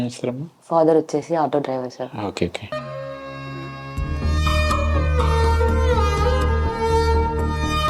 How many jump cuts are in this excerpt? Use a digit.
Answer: 0